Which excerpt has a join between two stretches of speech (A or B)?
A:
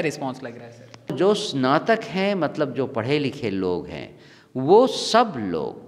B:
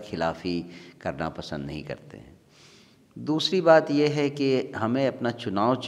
A